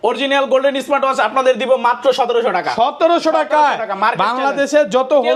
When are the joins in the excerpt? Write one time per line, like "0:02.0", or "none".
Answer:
none